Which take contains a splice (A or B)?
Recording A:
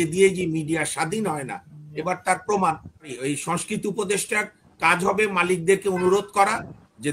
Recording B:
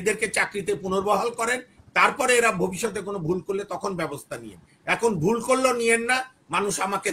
A